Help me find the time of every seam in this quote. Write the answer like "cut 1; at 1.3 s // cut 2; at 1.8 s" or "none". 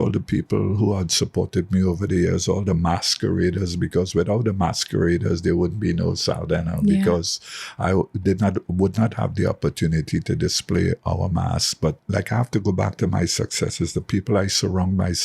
cut 1; at 12.0 s